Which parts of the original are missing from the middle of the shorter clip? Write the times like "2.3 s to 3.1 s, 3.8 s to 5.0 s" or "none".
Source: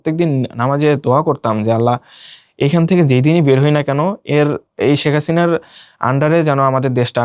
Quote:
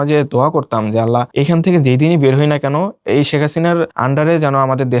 2.0 s to 2.5 s, 4.2 s to 4.7 s, 5.7 s to 6.0 s